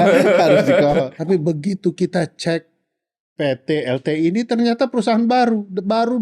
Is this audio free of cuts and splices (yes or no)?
no